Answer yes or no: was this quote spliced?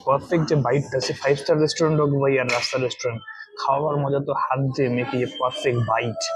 no